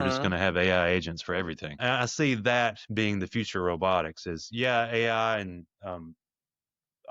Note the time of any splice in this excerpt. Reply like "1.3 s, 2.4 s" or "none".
1.8 s